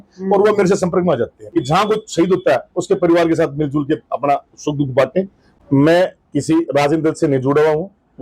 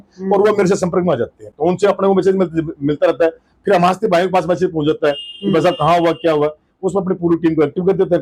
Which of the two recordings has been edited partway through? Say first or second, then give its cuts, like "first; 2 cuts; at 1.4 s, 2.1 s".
first; 2 cuts; at 1.4 s, 5.4 s